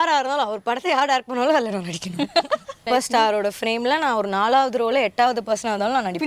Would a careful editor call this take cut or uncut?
cut